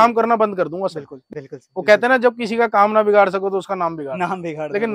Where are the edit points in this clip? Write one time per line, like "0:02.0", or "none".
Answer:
0:01.2

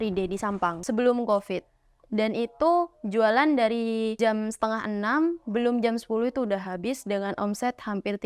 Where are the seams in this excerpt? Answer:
0:00.8
0:04.2

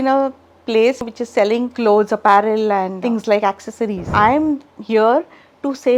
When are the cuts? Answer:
0:01.5
0:02.9
0:04.0

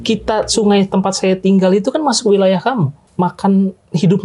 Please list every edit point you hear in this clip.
0:03.0

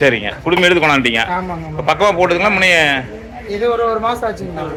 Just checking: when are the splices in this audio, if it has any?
none

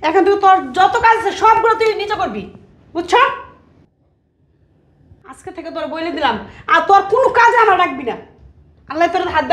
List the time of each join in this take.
none

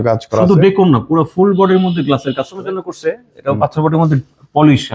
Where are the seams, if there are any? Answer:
0:02.6

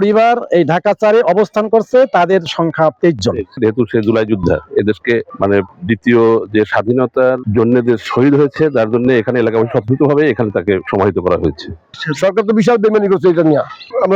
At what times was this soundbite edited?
0:03.6
0:05.3
0:07.4
0:10.8
0:11.8

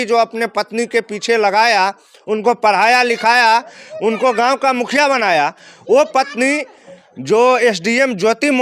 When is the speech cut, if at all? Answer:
none

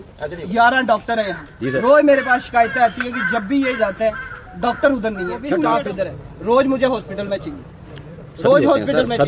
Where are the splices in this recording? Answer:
0:05.7

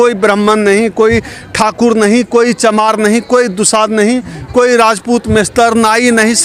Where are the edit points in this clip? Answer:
none

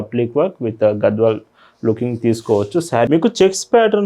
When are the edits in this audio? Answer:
0:03.1

